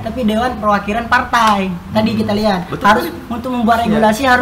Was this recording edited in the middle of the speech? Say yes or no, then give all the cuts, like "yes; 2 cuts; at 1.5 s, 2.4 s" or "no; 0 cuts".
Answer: no; 0 cuts